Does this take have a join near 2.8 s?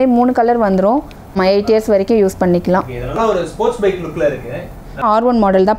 no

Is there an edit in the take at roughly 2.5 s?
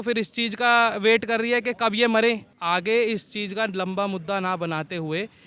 yes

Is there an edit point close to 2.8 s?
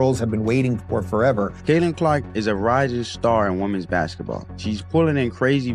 no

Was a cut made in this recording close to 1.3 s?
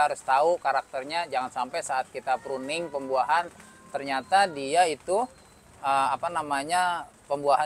no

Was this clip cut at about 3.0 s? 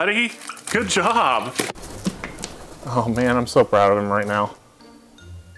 no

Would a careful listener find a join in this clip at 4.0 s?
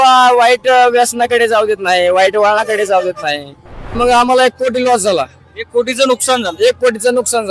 yes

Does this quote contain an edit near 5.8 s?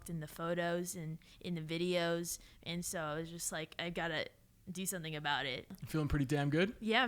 yes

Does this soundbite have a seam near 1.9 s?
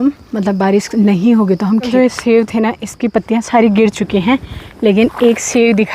yes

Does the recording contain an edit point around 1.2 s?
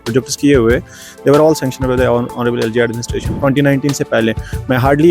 no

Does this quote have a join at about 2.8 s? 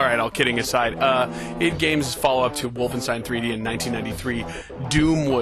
yes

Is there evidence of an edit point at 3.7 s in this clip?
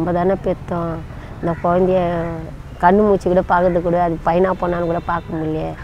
no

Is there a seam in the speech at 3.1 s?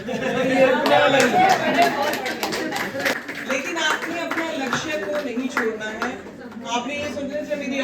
yes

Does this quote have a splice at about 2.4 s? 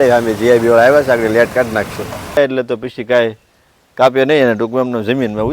yes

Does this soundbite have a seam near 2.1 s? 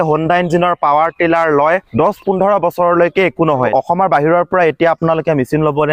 no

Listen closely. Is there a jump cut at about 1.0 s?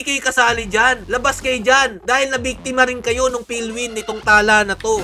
no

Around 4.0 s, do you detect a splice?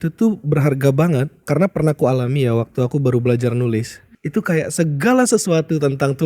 yes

